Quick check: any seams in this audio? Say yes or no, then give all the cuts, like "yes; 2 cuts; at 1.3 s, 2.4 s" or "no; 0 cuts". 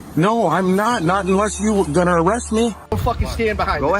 yes; 1 cut; at 3.0 s